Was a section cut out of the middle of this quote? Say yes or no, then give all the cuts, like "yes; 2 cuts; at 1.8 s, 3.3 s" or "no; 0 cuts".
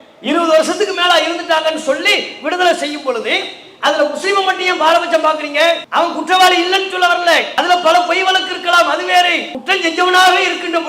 yes; 3 cuts; at 5.8 s, 7.5 s, 9.5 s